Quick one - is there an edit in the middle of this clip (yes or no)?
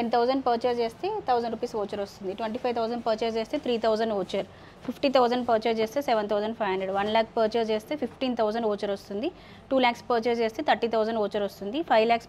no